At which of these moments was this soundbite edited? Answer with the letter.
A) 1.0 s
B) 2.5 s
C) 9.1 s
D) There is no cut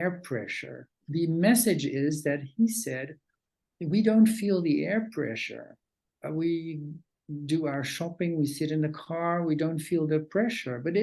A